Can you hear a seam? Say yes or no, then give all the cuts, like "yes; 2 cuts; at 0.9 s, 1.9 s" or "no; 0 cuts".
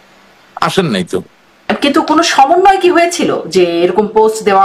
yes; 1 cut; at 1.7 s